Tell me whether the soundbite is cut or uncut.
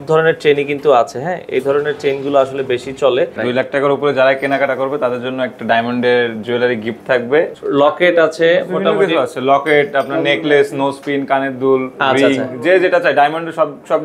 cut